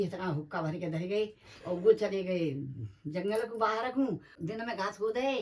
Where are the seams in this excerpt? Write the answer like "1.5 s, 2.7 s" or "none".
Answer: 4.3 s